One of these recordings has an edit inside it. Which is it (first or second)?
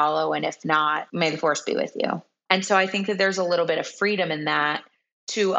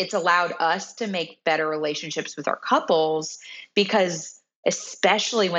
first